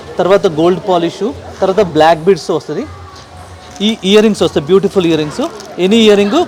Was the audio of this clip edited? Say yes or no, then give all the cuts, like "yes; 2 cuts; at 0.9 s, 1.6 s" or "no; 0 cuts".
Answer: no; 0 cuts